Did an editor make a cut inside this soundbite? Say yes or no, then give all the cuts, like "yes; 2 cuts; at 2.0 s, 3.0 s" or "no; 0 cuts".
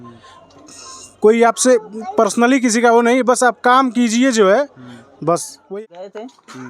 yes; 1 cut; at 5.6 s